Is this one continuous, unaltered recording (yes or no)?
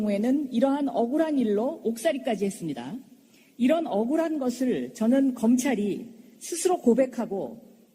no